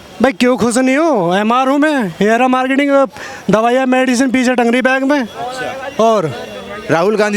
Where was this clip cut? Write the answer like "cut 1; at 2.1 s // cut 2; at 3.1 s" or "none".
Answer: none